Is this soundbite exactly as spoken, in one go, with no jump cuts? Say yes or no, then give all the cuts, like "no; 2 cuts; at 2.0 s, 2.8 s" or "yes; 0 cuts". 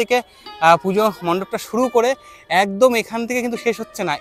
yes; 0 cuts